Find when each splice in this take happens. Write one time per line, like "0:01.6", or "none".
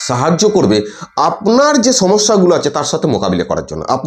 none